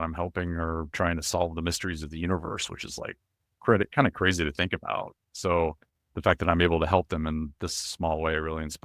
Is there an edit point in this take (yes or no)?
no